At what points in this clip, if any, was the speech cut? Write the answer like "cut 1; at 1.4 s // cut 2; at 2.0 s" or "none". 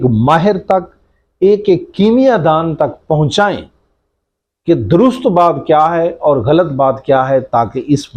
none